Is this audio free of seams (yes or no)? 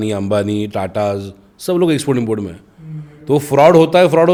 yes